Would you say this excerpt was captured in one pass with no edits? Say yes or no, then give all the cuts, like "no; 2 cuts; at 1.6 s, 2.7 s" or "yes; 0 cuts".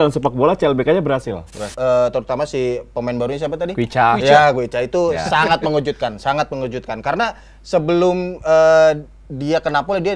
no; 1 cut; at 1.7 s